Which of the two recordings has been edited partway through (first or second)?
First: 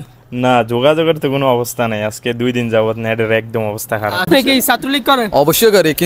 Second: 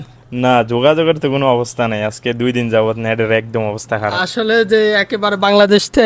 first